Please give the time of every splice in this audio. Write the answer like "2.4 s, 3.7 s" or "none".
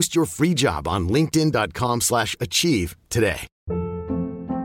3.5 s